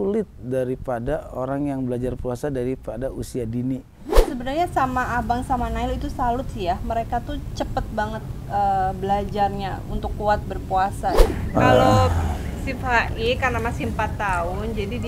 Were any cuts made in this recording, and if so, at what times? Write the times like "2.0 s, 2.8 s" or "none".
4.3 s, 11.2 s